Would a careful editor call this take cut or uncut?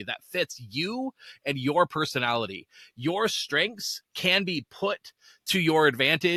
uncut